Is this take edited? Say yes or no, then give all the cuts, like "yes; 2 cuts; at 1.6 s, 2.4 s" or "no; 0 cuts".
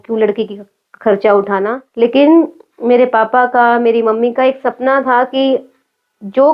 yes; 1 cut; at 1.8 s